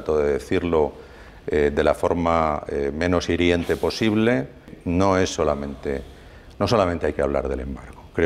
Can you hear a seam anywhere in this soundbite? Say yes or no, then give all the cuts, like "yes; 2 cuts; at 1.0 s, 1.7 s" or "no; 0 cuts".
yes; 1 cut; at 4.7 s